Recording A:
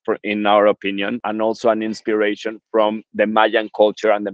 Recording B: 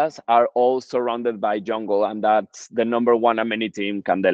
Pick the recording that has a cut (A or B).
A